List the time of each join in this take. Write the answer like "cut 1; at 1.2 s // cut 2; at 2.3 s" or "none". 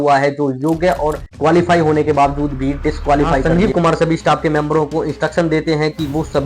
cut 1; at 3.4 s